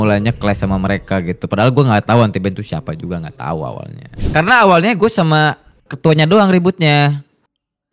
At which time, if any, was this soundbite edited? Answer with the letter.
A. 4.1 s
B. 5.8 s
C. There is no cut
A